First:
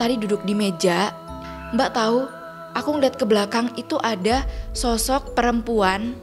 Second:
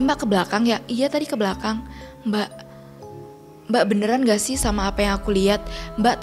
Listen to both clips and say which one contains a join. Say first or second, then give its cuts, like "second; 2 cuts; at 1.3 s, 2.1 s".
first; 1 cut; at 1.3 s